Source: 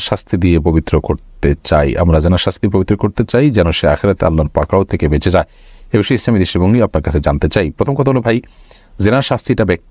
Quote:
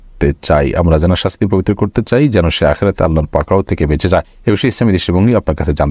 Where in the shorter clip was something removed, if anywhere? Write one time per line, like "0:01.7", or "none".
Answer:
0:04.3

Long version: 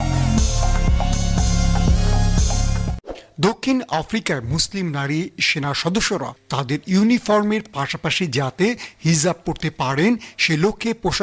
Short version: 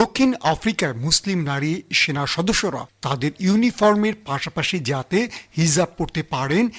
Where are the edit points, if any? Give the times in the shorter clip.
none

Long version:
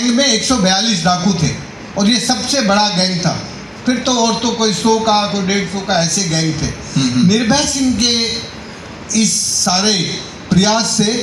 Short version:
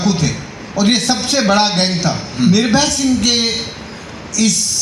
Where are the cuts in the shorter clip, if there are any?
0:02.4

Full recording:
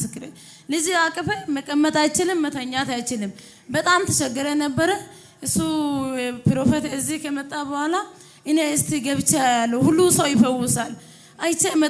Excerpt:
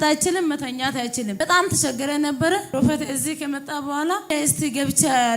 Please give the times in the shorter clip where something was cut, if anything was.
0:01.4
0:02.7
0:04.3

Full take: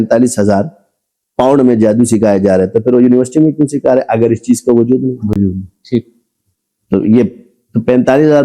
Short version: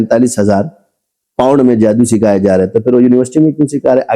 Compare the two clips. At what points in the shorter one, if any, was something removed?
none

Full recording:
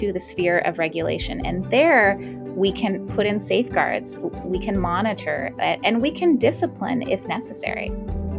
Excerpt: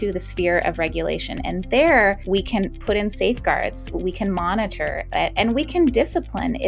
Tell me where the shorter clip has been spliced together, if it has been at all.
0:02.2
0:03.9

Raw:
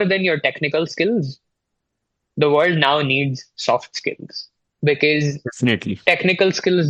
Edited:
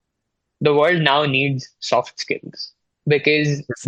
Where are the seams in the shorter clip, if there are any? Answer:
none

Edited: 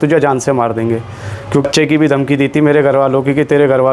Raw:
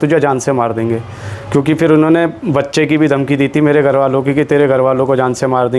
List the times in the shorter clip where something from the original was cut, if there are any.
0:01.6

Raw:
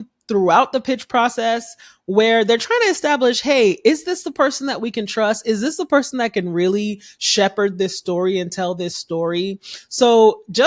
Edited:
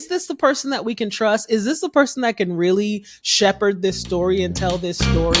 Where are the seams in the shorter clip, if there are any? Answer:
none

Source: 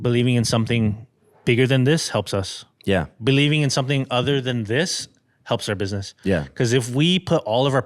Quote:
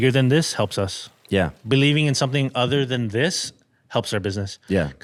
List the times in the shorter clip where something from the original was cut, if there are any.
none

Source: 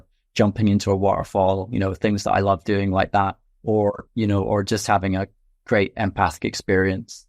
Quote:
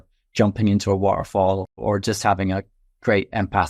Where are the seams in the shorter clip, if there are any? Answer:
0:01.8

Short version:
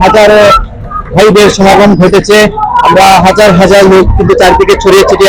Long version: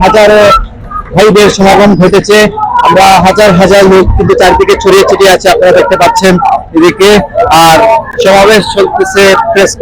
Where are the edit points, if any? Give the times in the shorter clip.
none

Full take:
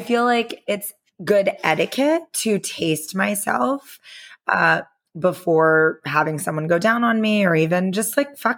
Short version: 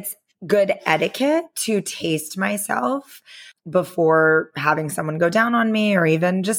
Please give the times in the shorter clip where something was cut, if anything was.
0:03.5

